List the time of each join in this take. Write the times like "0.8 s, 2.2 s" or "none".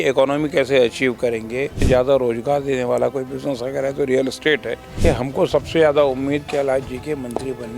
1.8 s, 4.9 s